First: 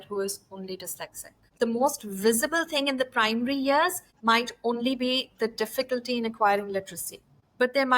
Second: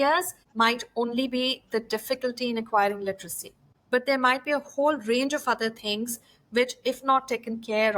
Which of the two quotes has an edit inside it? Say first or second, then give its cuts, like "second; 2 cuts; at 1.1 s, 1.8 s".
first; 1 cut; at 1.5 s